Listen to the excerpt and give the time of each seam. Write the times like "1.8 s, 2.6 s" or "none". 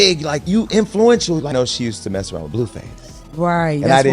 1.5 s